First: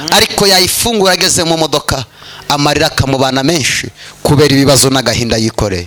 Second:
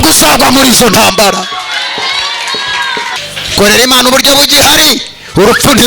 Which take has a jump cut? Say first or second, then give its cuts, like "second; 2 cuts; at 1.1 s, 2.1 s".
second; 1 cut; at 3.2 s